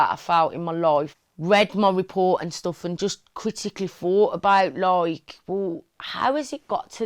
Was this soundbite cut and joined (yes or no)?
yes